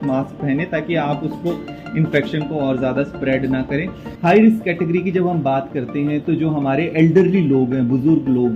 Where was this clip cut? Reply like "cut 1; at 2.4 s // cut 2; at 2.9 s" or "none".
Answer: cut 1; at 4.1 s